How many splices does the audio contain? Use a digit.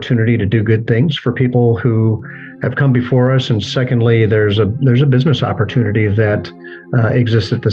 0